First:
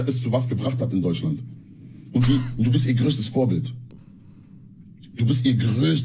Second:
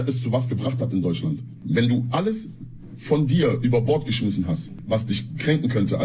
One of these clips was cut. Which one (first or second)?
second